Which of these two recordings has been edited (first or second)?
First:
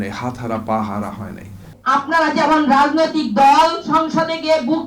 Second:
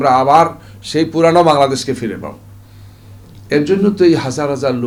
first